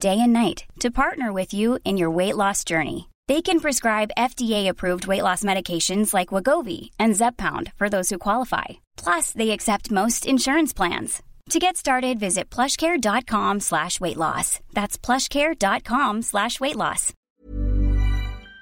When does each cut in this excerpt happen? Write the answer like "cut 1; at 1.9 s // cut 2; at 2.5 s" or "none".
cut 1; at 17.1 s